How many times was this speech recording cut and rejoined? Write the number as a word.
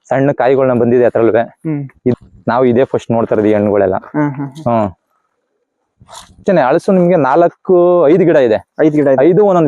two